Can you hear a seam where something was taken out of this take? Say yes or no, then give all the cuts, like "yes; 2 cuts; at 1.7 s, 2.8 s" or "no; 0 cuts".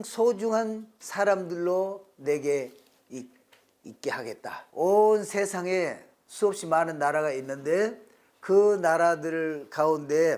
yes; 1 cut; at 4.6 s